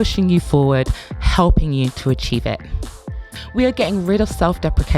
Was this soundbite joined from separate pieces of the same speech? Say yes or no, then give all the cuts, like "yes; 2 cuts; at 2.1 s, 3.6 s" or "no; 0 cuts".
yes; 1 cut; at 3.4 s